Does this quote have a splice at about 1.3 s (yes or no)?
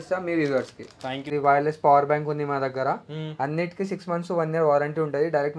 yes